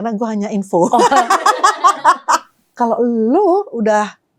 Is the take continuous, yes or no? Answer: no